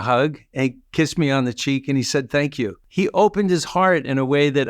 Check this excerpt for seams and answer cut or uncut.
cut